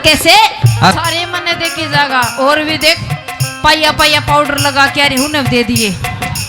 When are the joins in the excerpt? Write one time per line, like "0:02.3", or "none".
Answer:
0:00.9